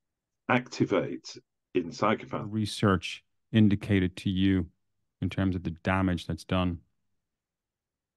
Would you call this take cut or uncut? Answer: cut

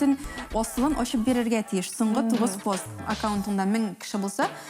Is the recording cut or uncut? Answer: cut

